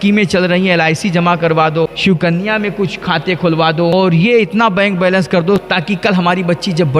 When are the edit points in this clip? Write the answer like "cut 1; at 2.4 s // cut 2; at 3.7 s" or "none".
cut 1; at 1.9 s // cut 2; at 3.9 s